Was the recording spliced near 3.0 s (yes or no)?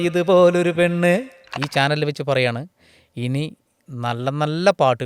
no